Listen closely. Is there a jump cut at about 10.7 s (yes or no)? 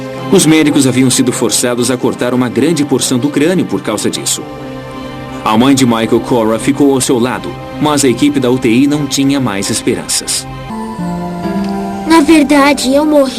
yes